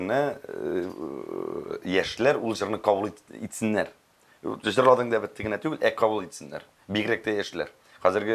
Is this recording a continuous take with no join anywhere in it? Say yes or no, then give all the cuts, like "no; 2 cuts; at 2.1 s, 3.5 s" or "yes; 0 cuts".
yes; 0 cuts